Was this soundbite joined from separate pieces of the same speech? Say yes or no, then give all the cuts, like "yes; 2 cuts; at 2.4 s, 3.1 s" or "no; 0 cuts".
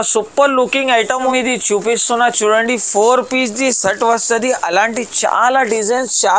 yes; 1 cut; at 1.3 s